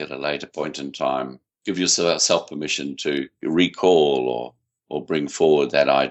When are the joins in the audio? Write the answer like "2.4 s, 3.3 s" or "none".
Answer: 1.4 s, 3.4 s